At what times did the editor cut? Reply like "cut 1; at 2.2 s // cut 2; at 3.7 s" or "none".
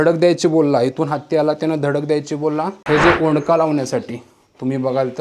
cut 1; at 2.8 s